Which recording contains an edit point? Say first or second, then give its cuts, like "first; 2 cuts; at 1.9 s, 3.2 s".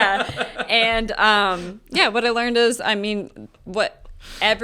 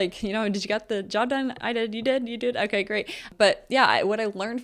second; 1 cut; at 3.3 s